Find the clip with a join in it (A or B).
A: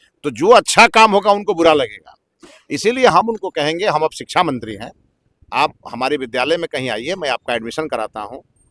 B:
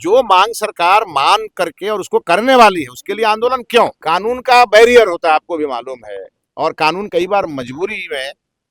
B